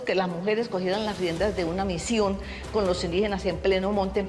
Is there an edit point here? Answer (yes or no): no